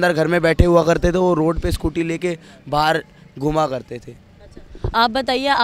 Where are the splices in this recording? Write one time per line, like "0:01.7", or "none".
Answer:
none